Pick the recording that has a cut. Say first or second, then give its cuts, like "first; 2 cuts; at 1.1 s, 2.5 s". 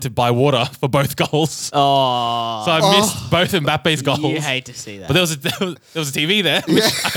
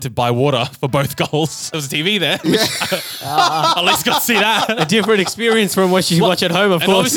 second; 1 cut; at 1.6 s